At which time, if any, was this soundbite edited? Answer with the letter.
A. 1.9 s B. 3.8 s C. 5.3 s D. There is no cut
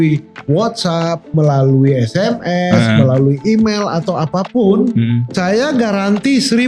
C